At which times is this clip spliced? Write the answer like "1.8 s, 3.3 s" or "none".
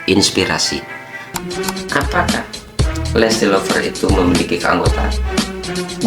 1.3 s